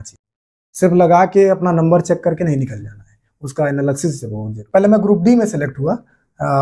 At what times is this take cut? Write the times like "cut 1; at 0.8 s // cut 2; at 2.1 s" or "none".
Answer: cut 1; at 4.6 s

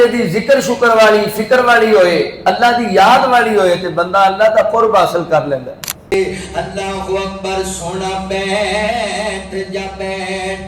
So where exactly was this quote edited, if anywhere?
cut 1; at 6.1 s

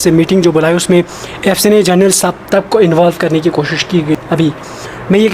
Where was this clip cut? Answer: cut 1; at 4.1 s

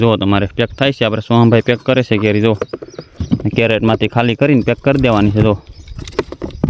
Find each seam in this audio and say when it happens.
none

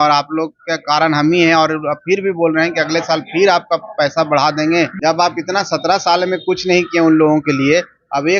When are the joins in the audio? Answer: cut 1; at 4.9 s

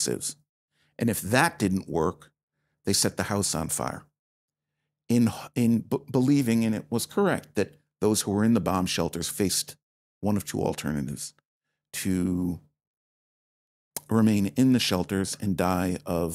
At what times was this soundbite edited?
none

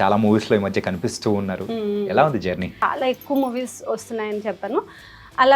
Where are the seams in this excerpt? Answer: cut 1; at 2.7 s

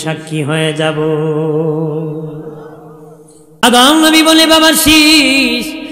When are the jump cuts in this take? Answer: cut 1; at 3.6 s

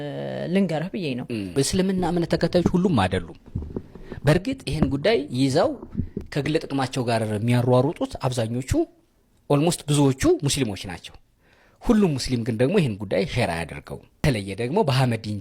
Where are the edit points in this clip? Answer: cut 1; at 14.2 s

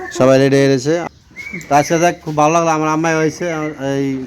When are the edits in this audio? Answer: cut 1; at 1.1 s

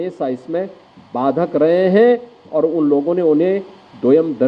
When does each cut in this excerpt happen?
none

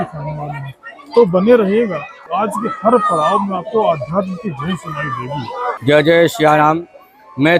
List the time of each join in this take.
cut 1; at 2.2 s // cut 2; at 5.8 s

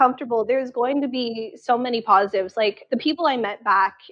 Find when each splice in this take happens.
cut 1; at 2.8 s

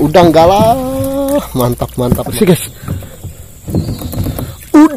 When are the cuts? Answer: cut 1; at 2.3 s

